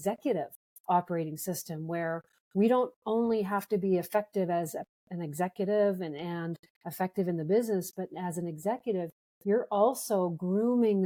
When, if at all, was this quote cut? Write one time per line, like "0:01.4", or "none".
none